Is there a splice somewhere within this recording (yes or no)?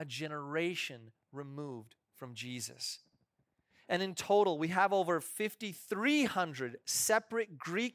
no